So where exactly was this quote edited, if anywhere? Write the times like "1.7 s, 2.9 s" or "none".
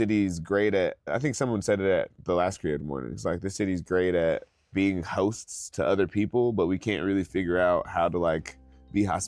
1.1 s, 4.7 s